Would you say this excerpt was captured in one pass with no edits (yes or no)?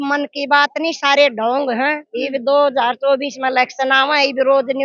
yes